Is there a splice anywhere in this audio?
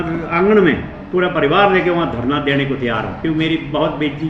no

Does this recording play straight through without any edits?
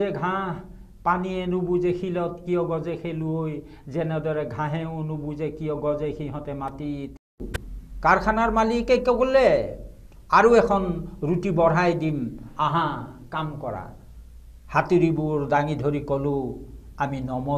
no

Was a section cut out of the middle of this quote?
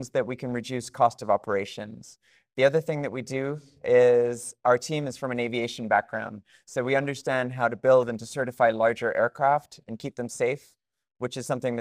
no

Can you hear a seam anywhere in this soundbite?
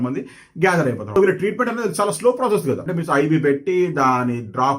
yes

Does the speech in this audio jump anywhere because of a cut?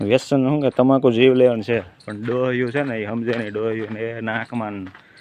no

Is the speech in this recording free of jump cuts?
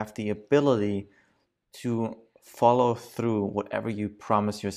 yes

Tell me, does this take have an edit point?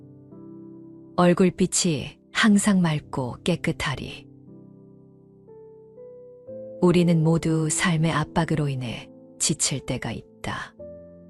yes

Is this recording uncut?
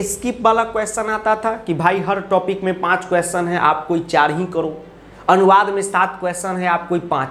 yes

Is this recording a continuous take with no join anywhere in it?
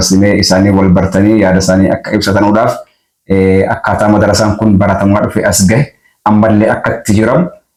yes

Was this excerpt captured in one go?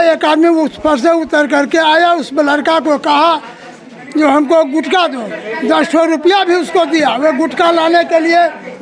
yes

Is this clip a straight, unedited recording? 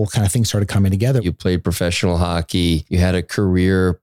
no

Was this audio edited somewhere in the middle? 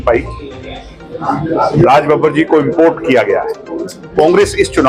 no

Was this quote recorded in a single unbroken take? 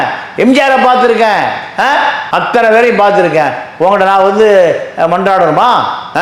yes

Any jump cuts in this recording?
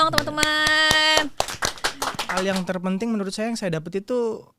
yes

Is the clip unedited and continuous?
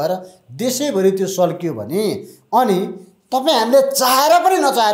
yes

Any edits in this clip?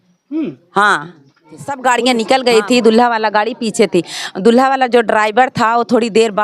yes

